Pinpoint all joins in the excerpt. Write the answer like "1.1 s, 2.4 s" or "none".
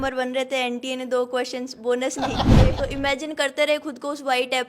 2.7 s